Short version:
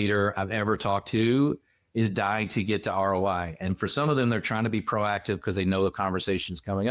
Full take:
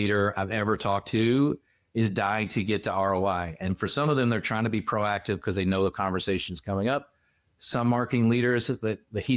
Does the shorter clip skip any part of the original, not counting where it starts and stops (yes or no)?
no